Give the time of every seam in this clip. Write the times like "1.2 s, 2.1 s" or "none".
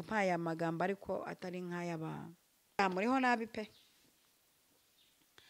2.8 s

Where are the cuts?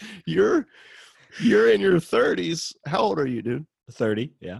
none

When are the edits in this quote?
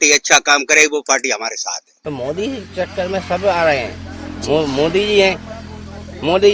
1.9 s

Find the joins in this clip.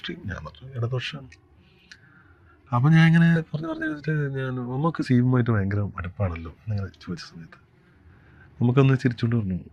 none

